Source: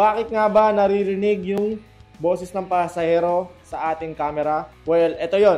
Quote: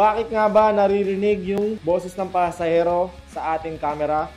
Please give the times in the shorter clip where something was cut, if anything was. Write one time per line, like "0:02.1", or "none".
0:01.8